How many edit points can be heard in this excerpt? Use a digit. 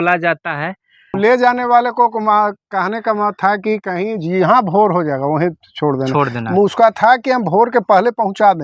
1